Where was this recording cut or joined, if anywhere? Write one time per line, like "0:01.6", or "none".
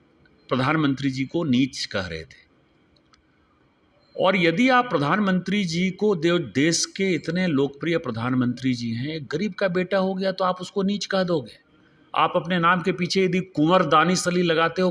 none

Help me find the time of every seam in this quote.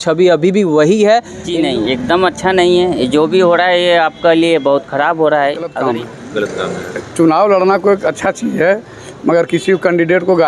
0:01.4
0:05.7

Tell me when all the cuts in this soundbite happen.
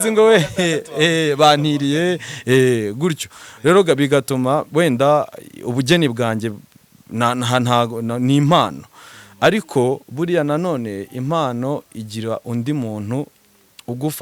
none

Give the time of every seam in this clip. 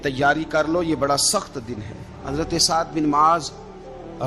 0:02.2

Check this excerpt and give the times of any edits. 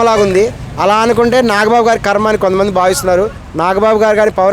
0:03.4

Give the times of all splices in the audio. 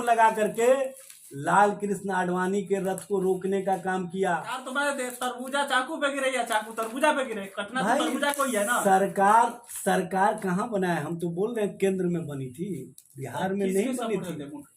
0:04.6

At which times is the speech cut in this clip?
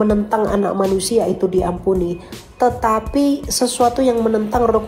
none

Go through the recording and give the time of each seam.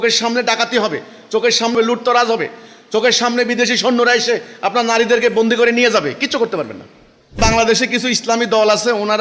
0:01.7
0:07.4

